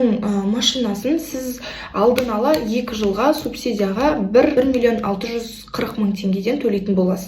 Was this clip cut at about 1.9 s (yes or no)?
no